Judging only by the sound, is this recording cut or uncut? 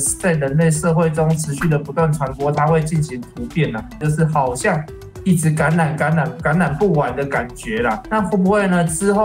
cut